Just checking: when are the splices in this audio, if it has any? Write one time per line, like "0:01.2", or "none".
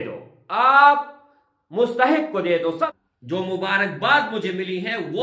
0:02.8